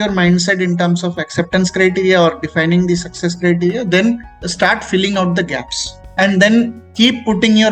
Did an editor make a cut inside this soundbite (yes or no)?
yes